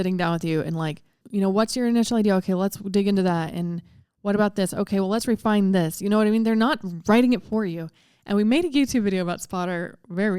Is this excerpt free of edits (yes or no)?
no